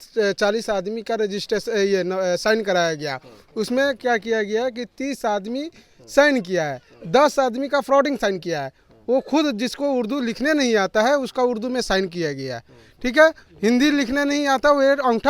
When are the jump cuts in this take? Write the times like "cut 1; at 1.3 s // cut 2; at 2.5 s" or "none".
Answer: none